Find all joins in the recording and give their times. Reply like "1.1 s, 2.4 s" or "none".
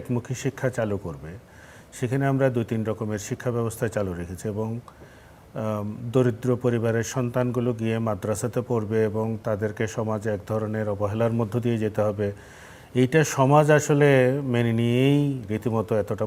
none